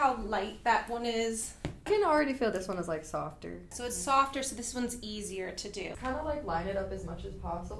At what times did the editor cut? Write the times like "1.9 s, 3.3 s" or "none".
1.9 s, 3.7 s, 5.9 s